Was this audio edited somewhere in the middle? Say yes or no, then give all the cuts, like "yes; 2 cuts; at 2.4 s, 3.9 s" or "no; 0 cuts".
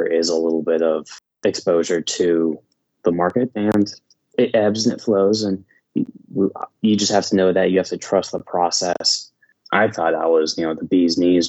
yes; 1 cut; at 9.5 s